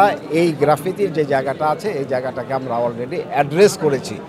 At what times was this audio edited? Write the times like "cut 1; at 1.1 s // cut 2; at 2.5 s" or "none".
none